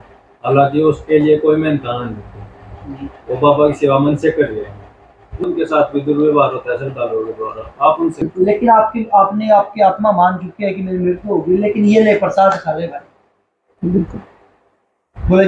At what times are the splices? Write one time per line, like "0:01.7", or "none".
0:05.4
0:08.2